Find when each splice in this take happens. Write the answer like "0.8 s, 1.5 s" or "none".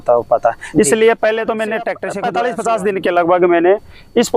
2.0 s